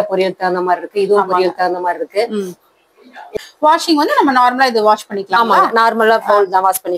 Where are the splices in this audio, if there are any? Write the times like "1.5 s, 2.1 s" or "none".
3.3 s